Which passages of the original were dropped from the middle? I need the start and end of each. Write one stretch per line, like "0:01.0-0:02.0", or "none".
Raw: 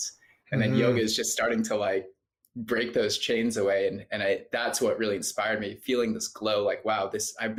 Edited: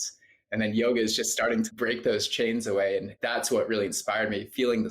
0:01.7-0:02.6
0:04.0-0:04.4